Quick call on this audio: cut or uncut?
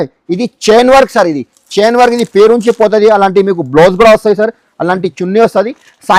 uncut